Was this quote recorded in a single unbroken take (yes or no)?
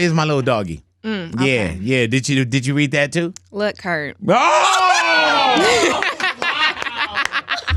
yes